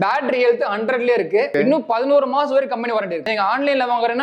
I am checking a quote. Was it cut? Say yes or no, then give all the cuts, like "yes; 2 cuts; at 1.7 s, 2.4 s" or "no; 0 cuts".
yes; 2 cuts; at 1.5 s, 3.2 s